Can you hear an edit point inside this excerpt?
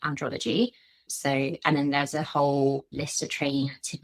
yes; 2 cuts; at 1.1 s, 2.9 s

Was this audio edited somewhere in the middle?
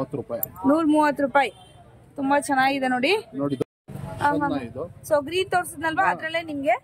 yes; 1 cut; at 3.6 s

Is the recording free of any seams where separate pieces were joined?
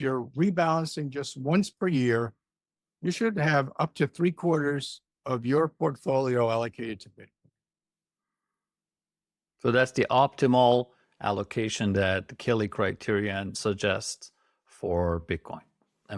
no; 1 cut; at 13.5 s

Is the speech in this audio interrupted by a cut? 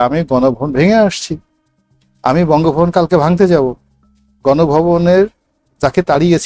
no; 0 cuts

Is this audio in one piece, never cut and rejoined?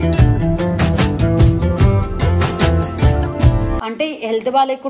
no; 1 cut; at 3.8 s

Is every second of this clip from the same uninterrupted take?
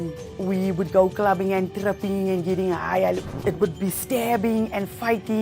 no; 1 cut; at 3.3 s

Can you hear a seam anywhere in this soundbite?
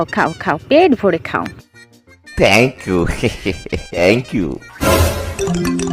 yes; 1 cut; at 4.0 s

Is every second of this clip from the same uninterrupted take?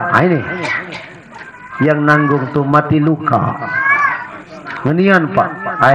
yes; 0 cuts

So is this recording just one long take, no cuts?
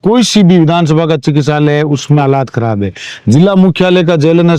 yes; 0 cuts

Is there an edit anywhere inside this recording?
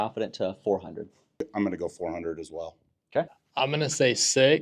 yes; 2 cuts; at 1.5 s, 3.4 s

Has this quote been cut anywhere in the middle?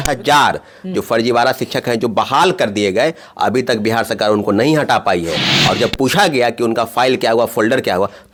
no; 0 cuts

